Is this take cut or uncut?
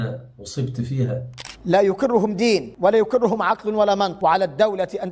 cut